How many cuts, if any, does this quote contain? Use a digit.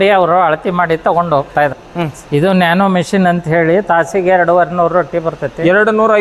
1